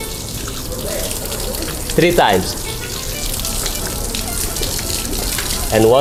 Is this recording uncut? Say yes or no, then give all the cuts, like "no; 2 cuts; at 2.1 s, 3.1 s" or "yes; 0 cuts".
yes; 0 cuts